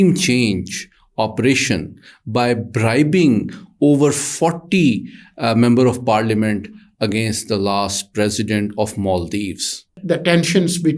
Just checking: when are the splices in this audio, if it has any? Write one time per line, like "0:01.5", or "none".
0:09.9